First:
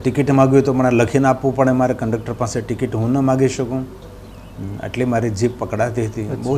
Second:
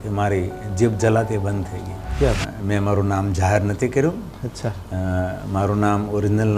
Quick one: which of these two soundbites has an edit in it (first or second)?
second